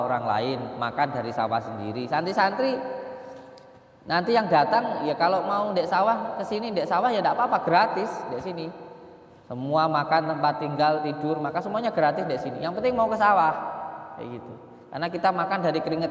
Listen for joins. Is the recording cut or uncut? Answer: uncut